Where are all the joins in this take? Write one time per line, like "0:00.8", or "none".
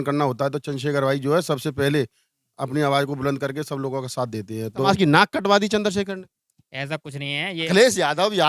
0:04.9
0:07.7